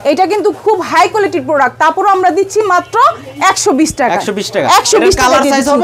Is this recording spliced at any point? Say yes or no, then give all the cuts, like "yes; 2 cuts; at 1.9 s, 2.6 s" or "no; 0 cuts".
no; 0 cuts